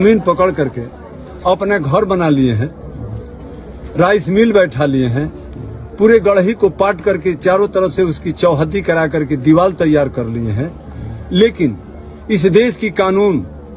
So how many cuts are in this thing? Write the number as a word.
zero